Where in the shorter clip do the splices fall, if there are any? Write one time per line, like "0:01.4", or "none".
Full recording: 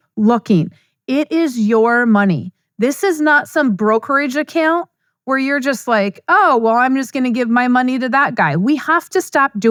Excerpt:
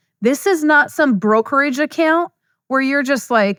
none